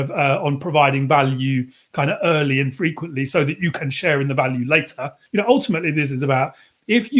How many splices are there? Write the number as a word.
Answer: one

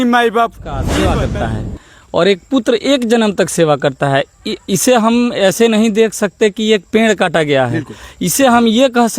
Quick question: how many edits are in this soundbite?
one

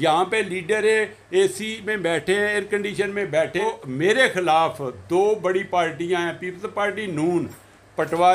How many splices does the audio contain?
one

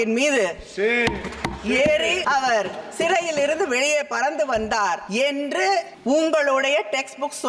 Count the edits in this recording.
three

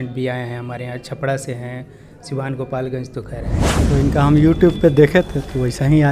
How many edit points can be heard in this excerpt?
one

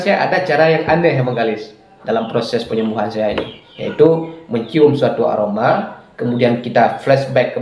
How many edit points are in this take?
one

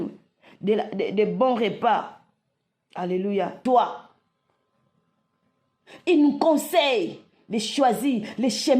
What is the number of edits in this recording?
one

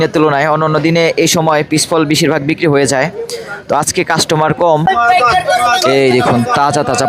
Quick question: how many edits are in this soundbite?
one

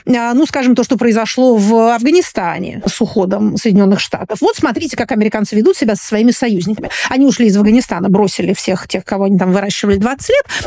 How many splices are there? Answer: one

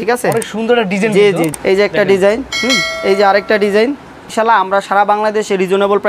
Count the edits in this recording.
three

